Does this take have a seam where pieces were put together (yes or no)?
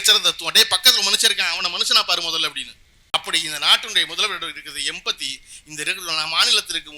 yes